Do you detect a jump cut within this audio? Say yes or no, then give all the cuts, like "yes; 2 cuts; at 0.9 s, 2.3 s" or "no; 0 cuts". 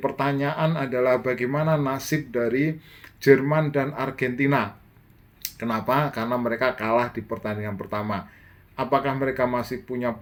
no; 0 cuts